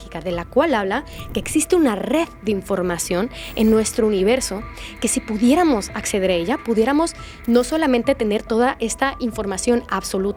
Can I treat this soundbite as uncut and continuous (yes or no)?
yes